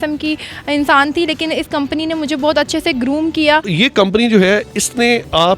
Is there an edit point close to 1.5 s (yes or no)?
no